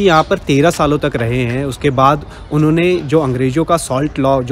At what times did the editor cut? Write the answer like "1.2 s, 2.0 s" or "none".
none

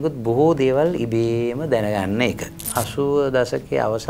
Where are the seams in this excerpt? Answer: 2.5 s

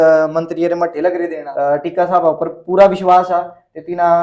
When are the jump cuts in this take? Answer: 1.4 s

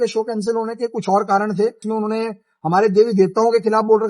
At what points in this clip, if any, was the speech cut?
1.8 s

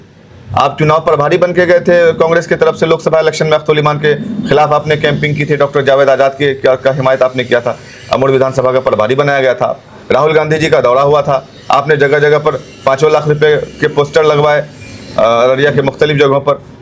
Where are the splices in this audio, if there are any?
none

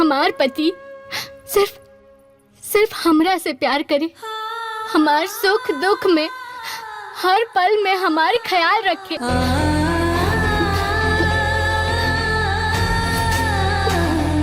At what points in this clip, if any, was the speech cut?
9.1 s

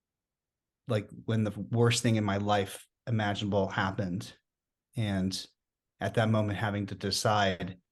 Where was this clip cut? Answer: none

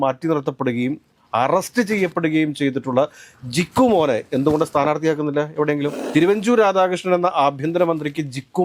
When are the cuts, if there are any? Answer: 6.0 s

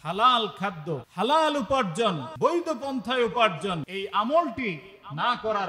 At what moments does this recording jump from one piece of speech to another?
1.1 s, 2.3 s, 3.9 s

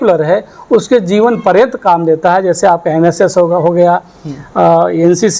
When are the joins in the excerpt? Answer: none

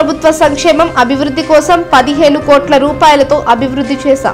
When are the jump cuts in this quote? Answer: none

